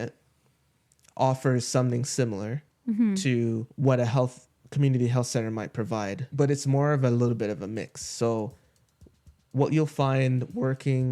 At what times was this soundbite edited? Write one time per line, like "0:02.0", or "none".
0:03.7